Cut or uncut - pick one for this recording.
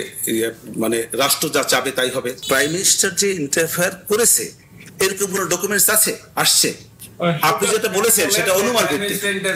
cut